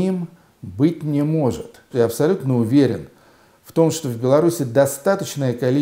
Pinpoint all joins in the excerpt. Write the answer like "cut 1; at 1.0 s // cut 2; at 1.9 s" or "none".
cut 1; at 1.9 s